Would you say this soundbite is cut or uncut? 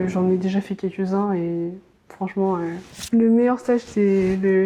uncut